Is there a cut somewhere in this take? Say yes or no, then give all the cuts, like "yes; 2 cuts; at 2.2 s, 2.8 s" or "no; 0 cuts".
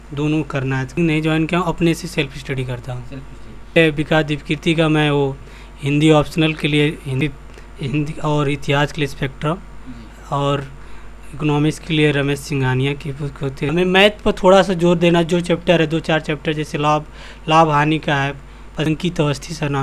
yes; 5 cuts; at 1.0 s, 3.8 s, 7.2 s, 13.7 s, 18.9 s